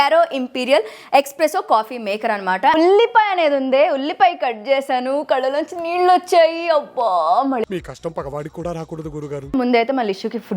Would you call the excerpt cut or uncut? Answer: cut